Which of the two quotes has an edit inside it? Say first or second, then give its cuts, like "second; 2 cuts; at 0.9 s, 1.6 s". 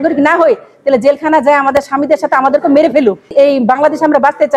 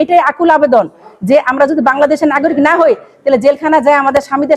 first; 1 cut; at 3.3 s